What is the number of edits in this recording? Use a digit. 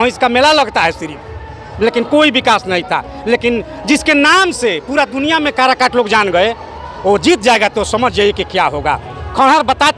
1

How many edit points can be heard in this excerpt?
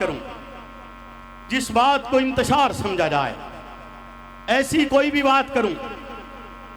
0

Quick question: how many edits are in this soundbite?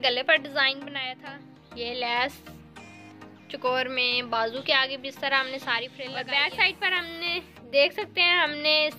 2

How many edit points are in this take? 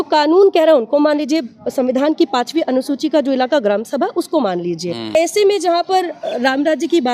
1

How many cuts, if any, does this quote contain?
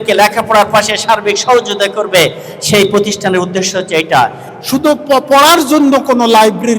1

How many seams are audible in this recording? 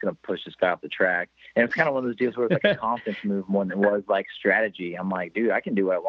1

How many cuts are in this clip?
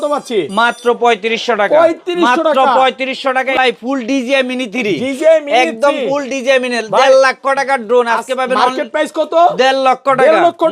1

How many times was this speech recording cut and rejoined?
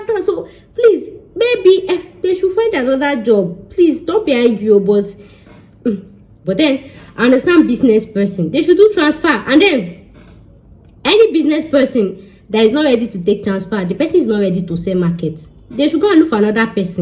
1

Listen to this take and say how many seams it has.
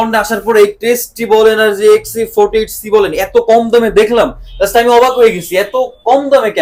0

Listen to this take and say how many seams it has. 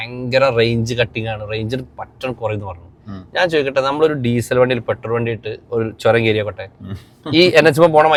0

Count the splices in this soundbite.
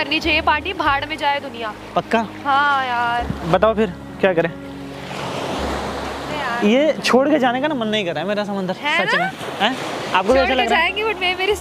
0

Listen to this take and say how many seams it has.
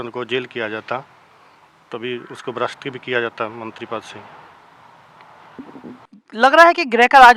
1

